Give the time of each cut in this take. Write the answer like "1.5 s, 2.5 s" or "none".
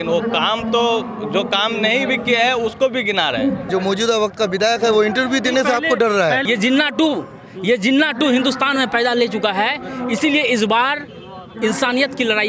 3.7 s, 6.4 s